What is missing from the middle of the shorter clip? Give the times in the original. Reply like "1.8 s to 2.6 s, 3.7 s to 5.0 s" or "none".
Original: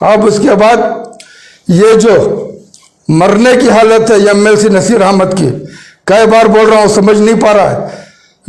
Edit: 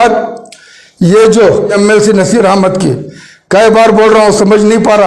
2.4 s to 4.3 s